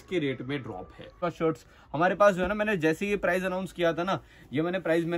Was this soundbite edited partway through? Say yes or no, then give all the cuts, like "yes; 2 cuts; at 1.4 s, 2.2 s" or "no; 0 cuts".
yes; 1 cut; at 1.2 s